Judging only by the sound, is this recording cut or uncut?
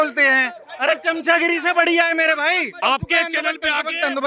cut